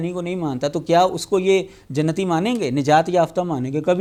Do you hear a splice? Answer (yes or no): no